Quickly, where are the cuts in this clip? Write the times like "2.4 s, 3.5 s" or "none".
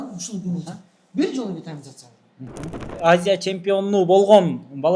2.9 s